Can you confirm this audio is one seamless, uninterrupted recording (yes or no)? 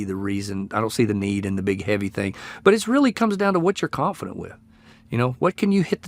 yes